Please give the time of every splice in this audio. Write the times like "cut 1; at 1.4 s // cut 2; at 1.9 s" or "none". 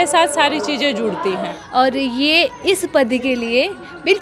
cut 1; at 1.5 s